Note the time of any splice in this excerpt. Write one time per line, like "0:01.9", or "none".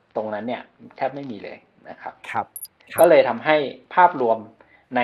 0:02.6